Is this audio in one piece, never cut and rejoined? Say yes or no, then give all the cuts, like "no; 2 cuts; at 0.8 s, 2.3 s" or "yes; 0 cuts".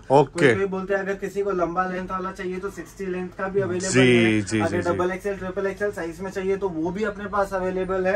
yes; 0 cuts